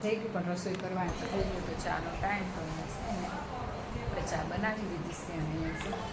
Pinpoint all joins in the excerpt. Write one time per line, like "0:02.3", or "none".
0:01.1
0:02.7